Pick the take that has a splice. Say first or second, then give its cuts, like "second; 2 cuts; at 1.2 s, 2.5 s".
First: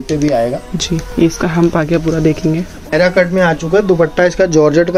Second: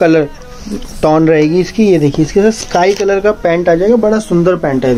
first; 1 cut; at 2.9 s